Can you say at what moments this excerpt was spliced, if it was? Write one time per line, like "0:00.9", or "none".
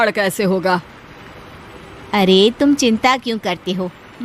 none